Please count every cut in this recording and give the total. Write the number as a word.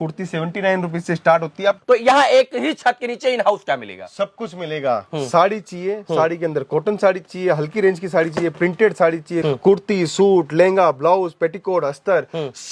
two